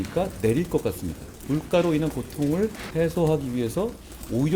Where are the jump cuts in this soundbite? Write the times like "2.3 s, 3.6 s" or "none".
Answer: 1.4 s, 2.8 s